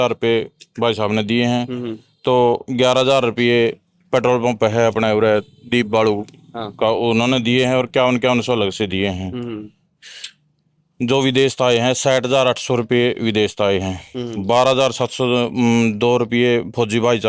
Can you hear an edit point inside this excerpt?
no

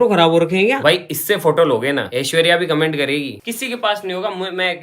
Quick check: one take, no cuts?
no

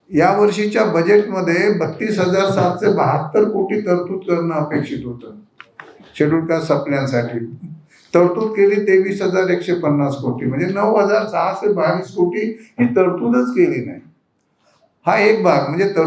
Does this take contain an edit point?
no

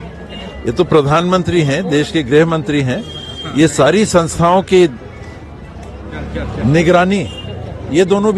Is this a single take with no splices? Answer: yes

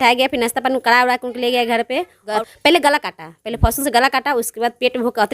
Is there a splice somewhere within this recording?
yes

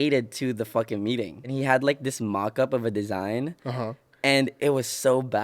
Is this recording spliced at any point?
yes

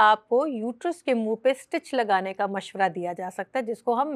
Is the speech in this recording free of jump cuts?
yes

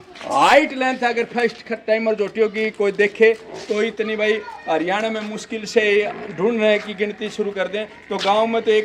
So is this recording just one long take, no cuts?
yes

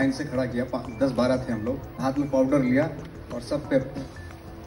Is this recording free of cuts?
no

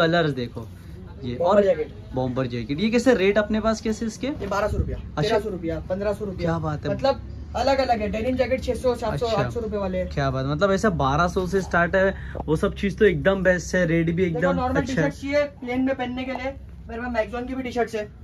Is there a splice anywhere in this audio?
no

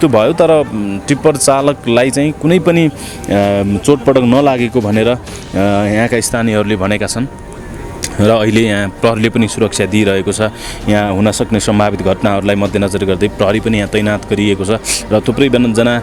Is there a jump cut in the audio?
no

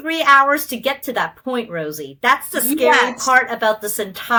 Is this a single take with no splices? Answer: yes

